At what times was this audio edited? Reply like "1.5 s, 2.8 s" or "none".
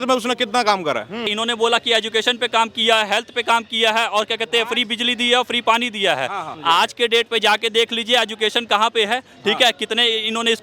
1.3 s, 6.5 s